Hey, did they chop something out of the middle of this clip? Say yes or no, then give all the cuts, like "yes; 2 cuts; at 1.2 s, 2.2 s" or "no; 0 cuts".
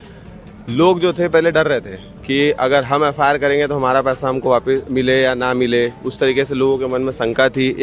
no; 0 cuts